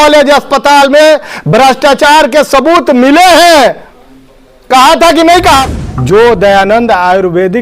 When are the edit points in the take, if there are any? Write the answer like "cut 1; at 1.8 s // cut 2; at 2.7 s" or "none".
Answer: cut 1; at 5.7 s